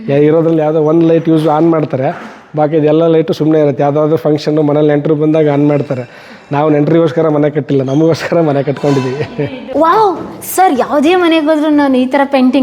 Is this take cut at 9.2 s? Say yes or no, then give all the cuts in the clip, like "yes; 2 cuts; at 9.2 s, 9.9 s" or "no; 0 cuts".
yes; 1 cut; at 9.2 s